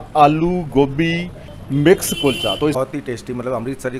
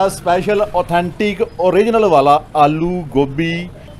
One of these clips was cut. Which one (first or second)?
first